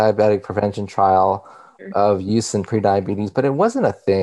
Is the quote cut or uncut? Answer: cut